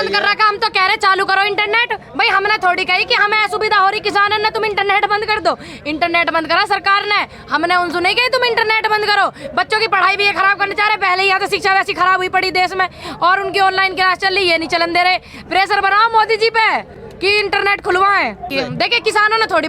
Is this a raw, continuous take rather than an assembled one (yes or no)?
no